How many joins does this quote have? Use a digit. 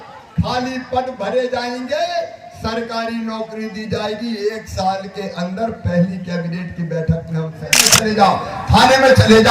1